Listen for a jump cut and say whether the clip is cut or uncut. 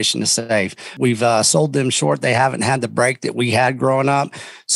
cut